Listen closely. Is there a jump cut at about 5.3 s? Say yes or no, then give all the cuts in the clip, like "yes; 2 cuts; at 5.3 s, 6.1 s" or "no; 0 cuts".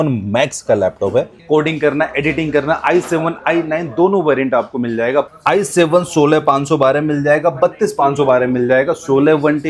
yes; 2 cuts; at 1.3 s, 5.3 s